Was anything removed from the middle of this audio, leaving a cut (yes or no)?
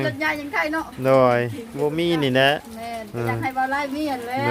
no